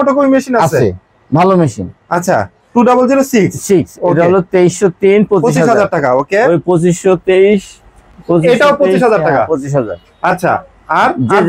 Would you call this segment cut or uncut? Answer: uncut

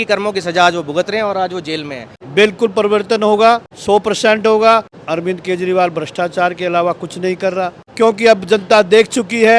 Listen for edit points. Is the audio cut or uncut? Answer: cut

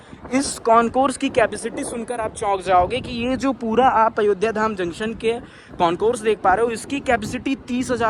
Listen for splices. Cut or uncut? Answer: uncut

